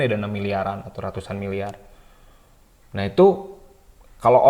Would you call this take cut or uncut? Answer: uncut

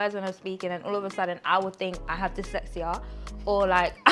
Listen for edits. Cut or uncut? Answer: uncut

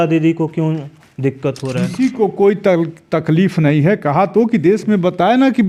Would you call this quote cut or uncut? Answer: uncut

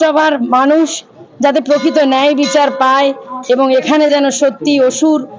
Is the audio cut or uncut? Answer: uncut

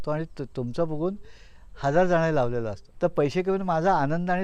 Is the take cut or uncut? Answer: cut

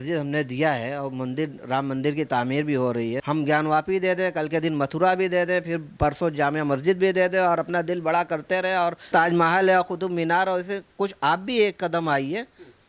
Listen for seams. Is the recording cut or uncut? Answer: cut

